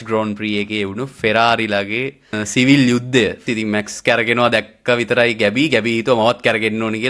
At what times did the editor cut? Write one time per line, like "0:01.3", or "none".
0:02.4
0:03.4